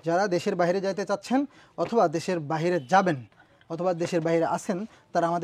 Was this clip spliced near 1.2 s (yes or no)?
no